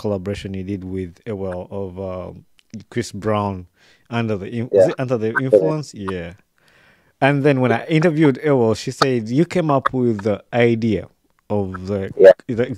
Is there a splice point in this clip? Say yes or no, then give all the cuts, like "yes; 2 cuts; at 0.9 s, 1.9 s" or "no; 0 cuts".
no; 0 cuts